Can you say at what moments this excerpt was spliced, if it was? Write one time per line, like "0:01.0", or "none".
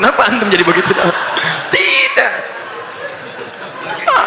none